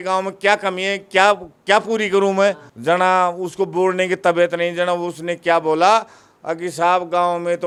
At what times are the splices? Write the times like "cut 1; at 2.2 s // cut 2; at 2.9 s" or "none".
none